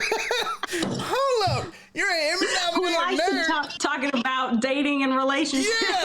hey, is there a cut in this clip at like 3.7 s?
yes; 1 cut; at 3.7 s

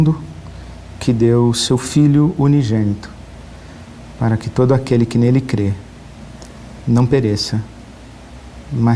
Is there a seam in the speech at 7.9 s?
yes; 1 cut; at 7.9 s

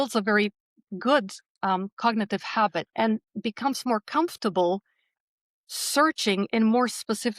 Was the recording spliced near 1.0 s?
no; 1 cut; at 2.9 s

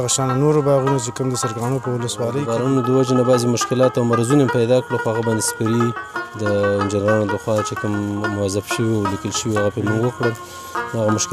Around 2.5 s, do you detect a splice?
yes; 1 cut; at 2.5 s

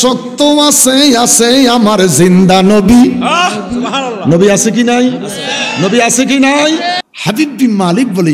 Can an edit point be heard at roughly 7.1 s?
yes; 1 cut; at 7.1 s

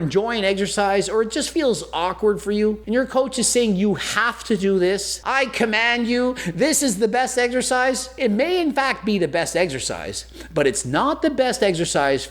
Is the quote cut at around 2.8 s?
yes; 3 cuts; at 2.8 s, 5.2 s, 8.1 s

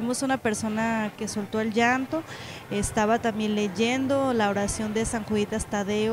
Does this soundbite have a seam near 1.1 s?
yes; 1 cut; at 1.1 s

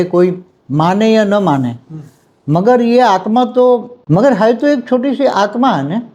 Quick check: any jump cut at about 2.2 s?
no; 1 cut; at 3.9 s

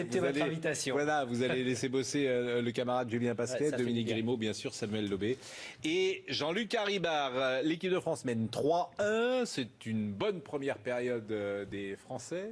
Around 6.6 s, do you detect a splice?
no; 1 cut; at 5.4 s

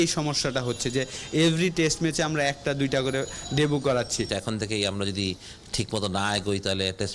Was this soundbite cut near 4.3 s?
yes; 1 cut; at 4.3 s

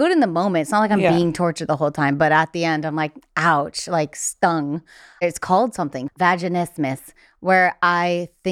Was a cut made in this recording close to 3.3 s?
no; 2 cuts; at 5.2 s, 6.0 s

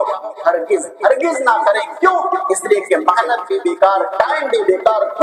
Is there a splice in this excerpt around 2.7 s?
no; 0 cuts

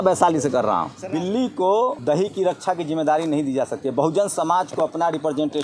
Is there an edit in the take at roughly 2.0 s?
yes; 2 cuts; at 1.0 s, 2.0 s

